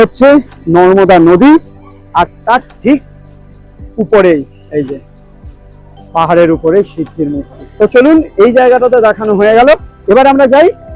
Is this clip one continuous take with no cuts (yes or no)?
yes